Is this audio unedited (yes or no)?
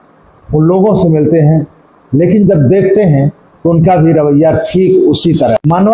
yes